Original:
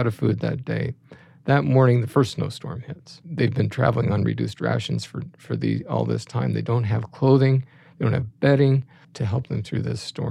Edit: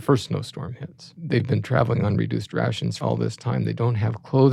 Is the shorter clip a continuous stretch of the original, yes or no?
no